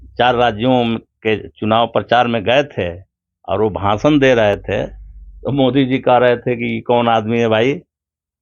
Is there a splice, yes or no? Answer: no